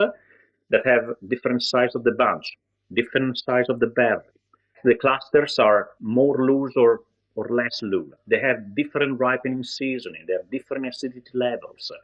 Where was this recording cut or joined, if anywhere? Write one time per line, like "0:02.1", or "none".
0:04.7
0:08.1